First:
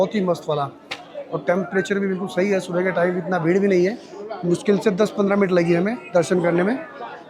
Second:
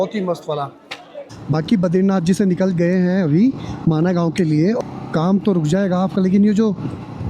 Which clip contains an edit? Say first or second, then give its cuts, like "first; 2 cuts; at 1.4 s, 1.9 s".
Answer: second; 2 cuts; at 1.2 s, 4.8 s